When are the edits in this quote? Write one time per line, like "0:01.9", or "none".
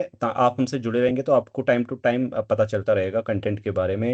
none